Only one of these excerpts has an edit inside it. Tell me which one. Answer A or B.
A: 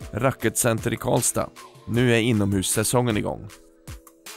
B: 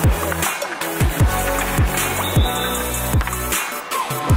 A